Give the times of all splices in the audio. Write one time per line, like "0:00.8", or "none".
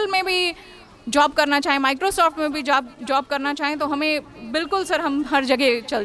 none